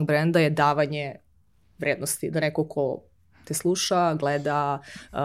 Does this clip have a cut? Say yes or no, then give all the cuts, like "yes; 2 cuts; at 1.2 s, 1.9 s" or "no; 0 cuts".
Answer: no; 0 cuts